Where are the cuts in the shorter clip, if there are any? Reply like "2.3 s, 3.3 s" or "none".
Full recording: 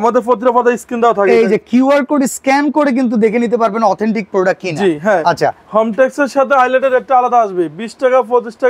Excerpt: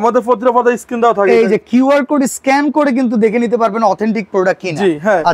none